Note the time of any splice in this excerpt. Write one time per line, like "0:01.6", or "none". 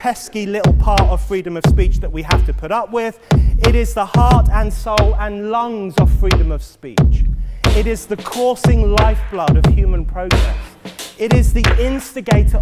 0:01.2